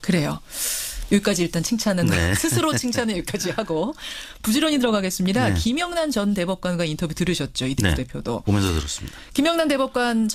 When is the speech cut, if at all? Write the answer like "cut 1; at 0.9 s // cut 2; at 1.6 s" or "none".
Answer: none